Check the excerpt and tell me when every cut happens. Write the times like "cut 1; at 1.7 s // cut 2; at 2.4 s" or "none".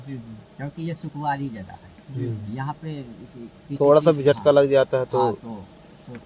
none